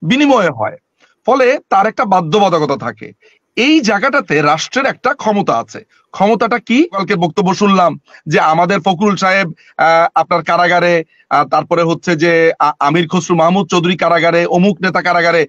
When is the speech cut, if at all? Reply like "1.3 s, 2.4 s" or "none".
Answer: 7.0 s